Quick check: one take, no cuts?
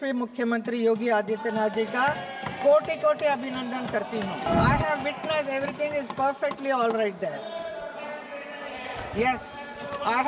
no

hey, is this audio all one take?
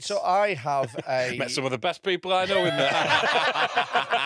yes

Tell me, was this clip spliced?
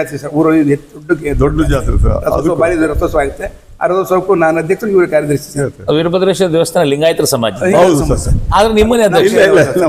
no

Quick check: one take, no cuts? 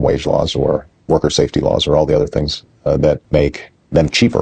yes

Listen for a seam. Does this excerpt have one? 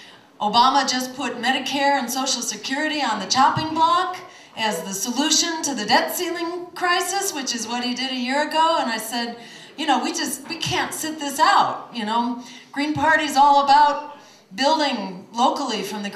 yes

